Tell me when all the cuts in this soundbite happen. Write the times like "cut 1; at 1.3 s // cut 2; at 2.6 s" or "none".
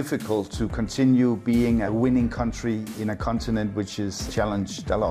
cut 1; at 1.9 s // cut 2; at 2.9 s // cut 3; at 4.2 s